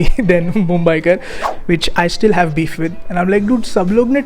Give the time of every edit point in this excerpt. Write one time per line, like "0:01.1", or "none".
0:01.4